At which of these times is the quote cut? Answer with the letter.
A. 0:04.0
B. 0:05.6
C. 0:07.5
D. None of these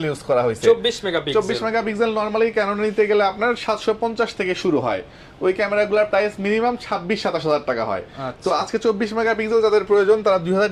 D